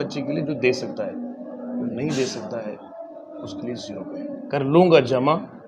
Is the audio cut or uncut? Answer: cut